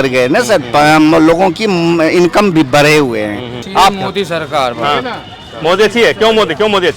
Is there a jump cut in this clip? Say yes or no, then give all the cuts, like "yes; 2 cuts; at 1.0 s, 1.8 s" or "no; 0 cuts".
yes; 1 cut; at 3.6 s